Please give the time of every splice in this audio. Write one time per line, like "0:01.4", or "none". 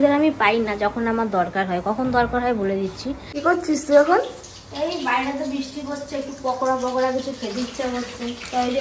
0:03.3